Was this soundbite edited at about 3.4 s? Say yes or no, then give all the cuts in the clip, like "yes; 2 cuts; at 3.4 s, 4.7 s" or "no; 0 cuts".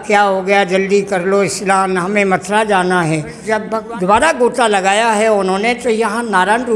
yes; 1 cut; at 3.4 s